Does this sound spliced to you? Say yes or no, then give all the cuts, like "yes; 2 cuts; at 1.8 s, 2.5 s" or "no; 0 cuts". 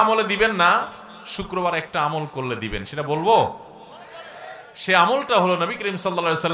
no; 0 cuts